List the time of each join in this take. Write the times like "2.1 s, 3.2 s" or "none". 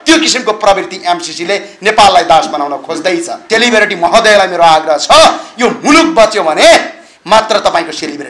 3.4 s